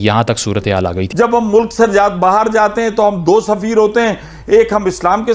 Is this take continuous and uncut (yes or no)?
no